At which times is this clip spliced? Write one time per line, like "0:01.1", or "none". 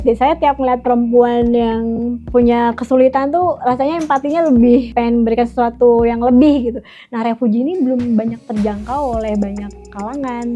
0:02.2
0:04.9